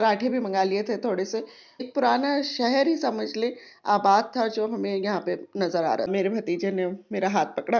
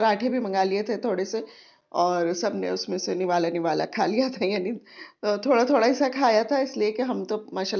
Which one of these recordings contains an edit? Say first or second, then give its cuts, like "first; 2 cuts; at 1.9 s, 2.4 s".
first; 2 cuts; at 1.9 s, 6.1 s